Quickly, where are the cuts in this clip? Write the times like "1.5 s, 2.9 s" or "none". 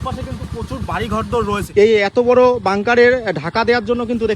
1.7 s